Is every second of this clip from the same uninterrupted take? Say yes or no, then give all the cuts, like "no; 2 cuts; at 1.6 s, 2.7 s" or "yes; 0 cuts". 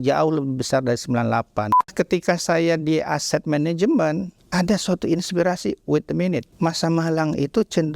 no; 3 cuts; at 1.9 s, 4.4 s, 6.5 s